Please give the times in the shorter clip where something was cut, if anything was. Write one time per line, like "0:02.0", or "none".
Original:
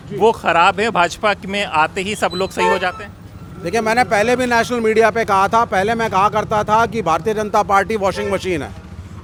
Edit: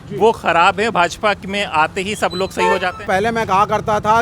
0:03.1